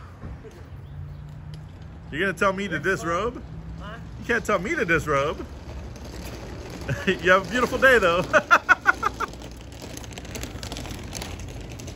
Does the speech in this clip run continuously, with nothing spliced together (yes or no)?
yes